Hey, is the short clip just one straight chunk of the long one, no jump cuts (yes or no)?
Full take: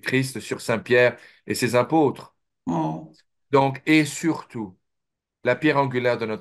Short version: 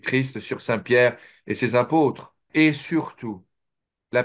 no